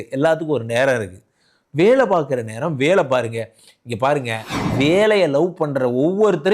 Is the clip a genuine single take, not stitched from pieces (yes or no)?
no